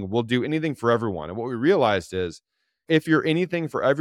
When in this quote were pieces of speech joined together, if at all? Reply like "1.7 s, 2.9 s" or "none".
none